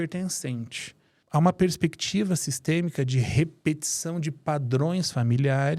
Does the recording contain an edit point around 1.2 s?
yes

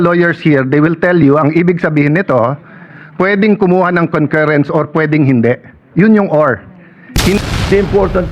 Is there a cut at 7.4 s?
yes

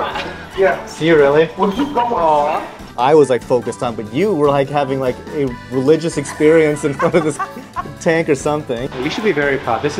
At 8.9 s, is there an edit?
yes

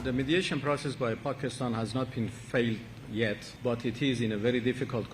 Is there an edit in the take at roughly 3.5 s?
yes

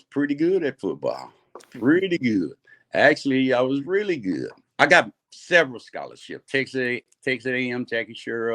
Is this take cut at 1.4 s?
no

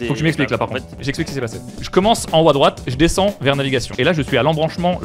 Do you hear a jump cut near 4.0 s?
yes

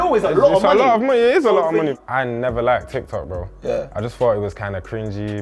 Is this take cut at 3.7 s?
no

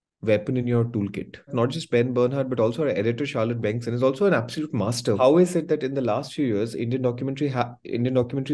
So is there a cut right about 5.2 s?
yes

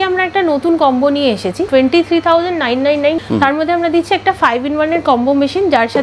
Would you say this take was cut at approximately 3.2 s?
yes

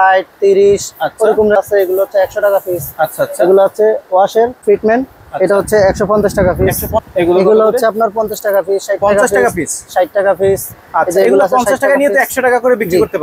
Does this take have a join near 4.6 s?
yes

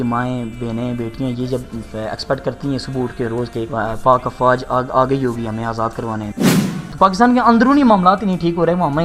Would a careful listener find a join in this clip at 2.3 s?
no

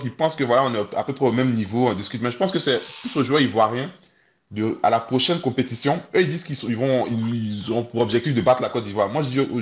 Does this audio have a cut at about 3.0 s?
no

